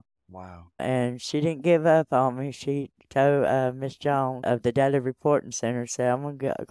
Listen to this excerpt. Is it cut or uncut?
uncut